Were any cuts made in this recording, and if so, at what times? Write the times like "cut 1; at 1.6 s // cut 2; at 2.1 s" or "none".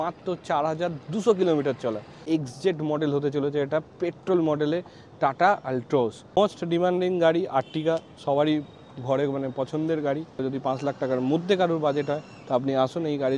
cut 1; at 2.2 s // cut 2; at 6.2 s // cut 3; at 10.4 s